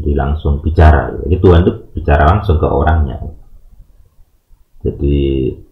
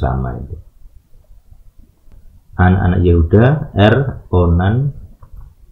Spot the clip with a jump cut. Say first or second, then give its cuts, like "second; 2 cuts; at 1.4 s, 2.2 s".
second; 1 cut; at 2.2 s